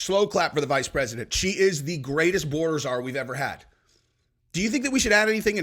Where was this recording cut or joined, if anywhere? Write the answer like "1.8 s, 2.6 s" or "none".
none